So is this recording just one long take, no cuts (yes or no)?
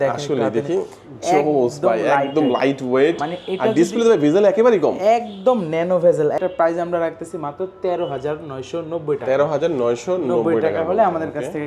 no